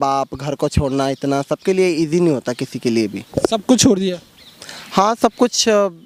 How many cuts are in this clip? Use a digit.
0